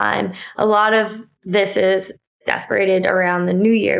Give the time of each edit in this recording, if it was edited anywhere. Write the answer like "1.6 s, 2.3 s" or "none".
2.4 s